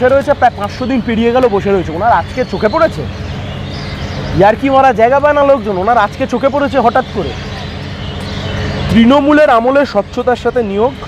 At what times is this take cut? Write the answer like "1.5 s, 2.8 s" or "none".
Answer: none